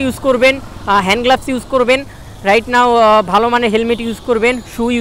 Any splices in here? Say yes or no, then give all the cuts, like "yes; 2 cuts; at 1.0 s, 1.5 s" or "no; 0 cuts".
no; 0 cuts